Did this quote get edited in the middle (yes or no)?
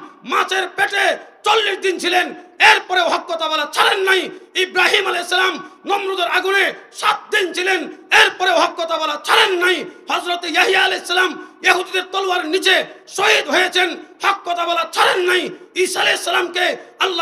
no